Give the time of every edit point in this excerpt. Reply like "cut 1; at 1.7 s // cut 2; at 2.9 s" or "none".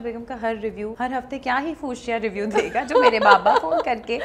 cut 1; at 0.9 s

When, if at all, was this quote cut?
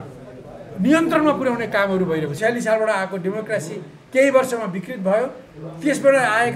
cut 1; at 2.3 s

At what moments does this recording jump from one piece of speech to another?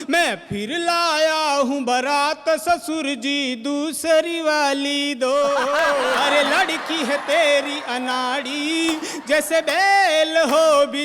cut 1; at 6.2 s

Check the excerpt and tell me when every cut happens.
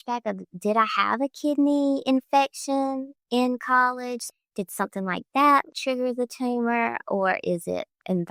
none

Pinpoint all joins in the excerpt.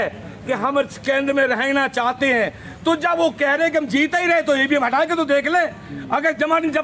none

